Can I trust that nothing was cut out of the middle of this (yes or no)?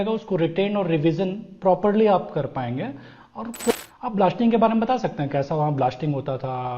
no